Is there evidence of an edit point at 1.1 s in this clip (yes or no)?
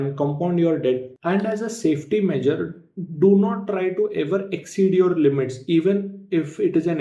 yes